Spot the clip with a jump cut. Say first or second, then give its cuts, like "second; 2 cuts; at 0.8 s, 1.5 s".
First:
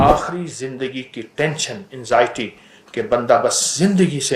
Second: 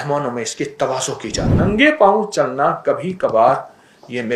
second; 1 cut; at 1.6 s